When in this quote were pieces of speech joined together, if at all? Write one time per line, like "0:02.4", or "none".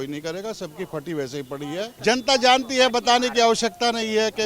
0:01.9